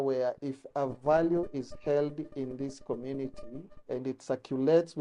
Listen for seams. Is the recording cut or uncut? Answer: uncut